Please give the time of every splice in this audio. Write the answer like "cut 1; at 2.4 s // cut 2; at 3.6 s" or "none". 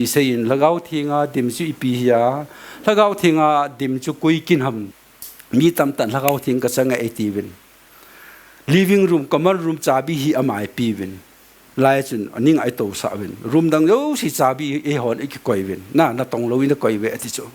cut 1; at 4.9 s